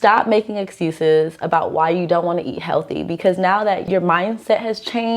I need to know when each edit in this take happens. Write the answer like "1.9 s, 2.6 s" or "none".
3.8 s